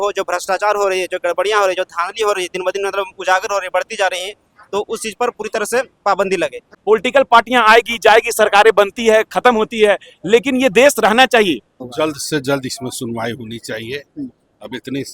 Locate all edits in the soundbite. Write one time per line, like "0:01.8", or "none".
0:06.7
0:11.8